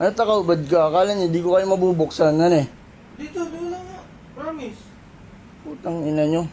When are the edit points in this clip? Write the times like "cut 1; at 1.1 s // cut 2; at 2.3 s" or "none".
none

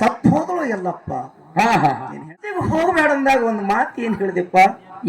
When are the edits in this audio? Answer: cut 1; at 2.6 s

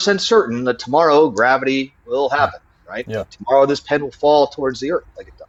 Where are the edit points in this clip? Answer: none

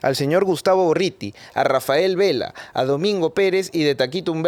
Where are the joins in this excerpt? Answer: none

